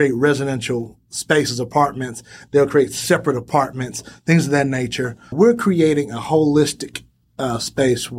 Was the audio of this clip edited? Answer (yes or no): yes